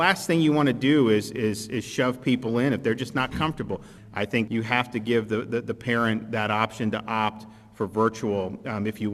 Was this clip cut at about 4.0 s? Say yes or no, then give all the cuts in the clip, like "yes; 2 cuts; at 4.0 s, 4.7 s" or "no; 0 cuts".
yes; 1 cut; at 4.0 s